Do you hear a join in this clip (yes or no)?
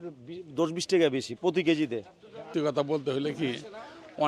yes